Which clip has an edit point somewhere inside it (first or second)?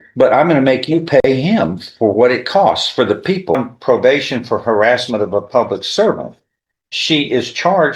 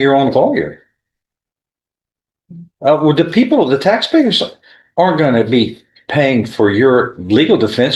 first